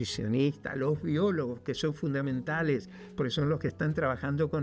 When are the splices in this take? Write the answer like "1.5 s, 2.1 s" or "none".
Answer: none